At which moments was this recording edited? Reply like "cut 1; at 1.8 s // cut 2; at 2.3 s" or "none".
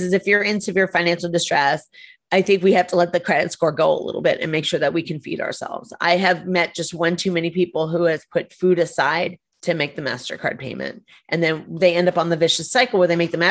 none